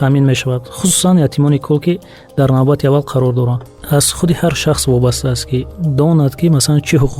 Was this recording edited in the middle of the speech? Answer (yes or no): yes